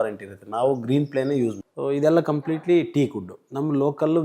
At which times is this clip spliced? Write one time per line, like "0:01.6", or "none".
0:01.7